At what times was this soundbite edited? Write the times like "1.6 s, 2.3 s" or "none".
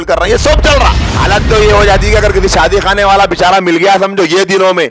1.1 s